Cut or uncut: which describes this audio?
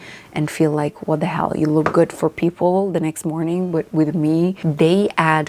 cut